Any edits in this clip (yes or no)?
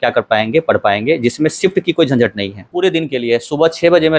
yes